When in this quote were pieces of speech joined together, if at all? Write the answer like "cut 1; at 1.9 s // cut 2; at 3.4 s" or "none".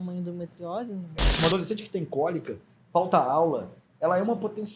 cut 1; at 1.4 s